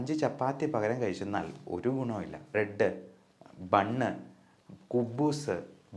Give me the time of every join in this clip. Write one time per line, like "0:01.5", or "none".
0:02.5